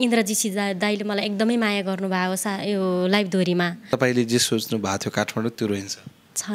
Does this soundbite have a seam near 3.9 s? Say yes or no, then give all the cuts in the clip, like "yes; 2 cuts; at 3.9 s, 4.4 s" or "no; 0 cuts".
yes; 1 cut; at 3.9 s